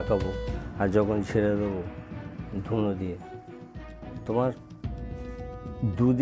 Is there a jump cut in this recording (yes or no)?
no